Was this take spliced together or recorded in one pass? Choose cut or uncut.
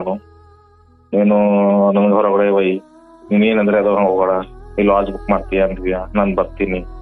uncut